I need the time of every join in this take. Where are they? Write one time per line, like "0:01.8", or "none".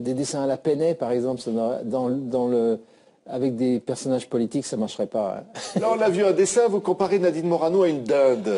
0:05.5